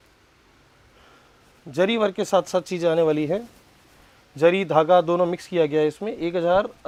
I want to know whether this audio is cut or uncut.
uncut